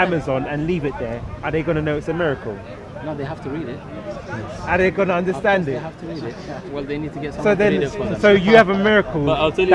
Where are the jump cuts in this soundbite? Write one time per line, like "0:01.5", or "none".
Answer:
none